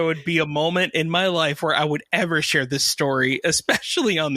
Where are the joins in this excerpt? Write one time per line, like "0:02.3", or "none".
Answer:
none